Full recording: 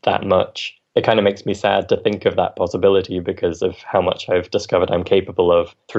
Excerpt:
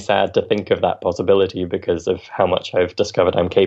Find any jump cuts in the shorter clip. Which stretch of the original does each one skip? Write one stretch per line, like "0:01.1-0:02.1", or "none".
none